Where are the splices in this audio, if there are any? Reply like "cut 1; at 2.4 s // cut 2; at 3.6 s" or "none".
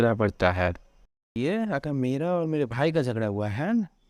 cut 1; at 1.3 s